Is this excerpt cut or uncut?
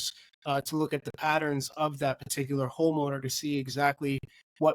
uncut